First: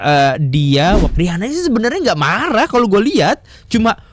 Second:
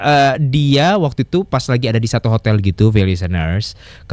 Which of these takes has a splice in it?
first; 1 cut; at 1.1 s

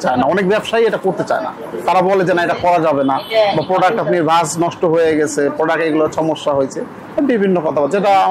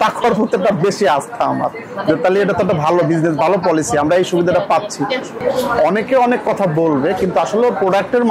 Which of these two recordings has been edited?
second; 1 cut; at 5.4 s

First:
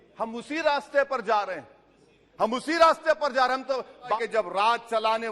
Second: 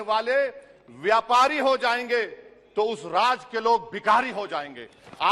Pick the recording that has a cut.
first; 1 cut; at 4.1 s

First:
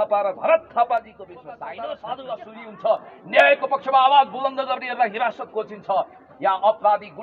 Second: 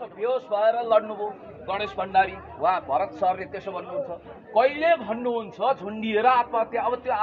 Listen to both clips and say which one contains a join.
first; 1 cut; at 1.6 s

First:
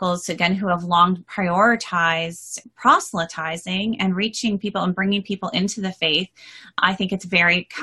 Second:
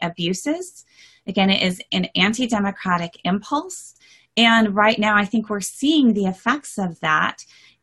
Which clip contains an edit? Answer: first; 2 cuts; at 2.6 s, 6.8 s

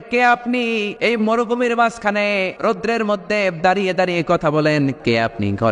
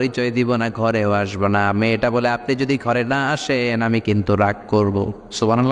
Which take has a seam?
first; 3 cuts; at 0.9 s, 2.5 s, 5.0 s

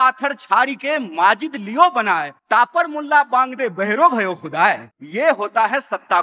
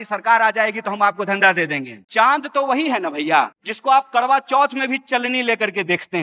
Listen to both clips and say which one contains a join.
second; 1 cut; at 2.0 s

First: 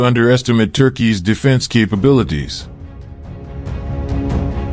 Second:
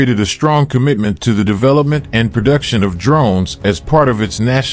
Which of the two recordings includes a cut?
first; 1 cut; at 2.6 s

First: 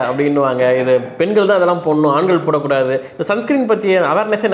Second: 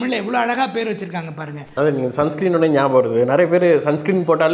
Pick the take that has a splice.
second; 1 cut; at 1.6 s

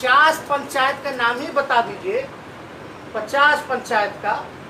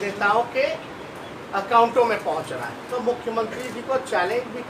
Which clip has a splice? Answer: second; 1 cut; at 2.9 s

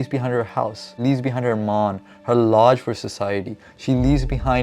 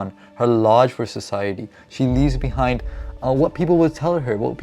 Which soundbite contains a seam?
first; 1 cut; at 0.9 s

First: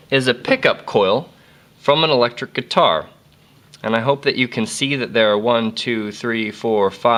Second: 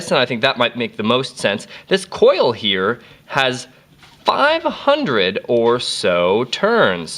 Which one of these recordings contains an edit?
second; 1 cut; at 1.3 s

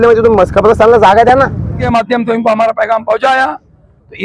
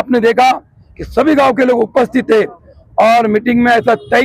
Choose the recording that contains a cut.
first; 1 cut; at 1.8 s

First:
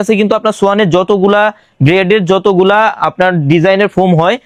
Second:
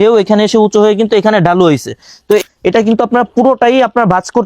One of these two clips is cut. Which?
second; 1 cut; at 2.4 s

